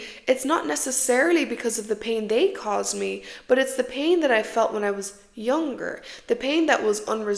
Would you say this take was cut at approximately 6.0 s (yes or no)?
no